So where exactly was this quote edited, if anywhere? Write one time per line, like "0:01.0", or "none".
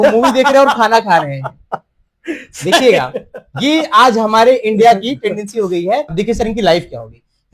0:06.1

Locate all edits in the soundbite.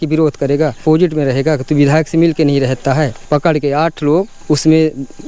0:00.8
0:03.2
0:04.4

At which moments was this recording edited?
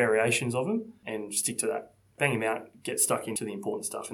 0:01.0
0:02.1
0:03.4

